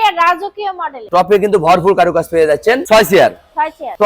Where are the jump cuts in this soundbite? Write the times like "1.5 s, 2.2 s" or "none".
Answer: 2.8 s